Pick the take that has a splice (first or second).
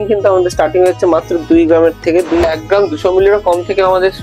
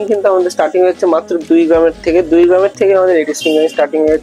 first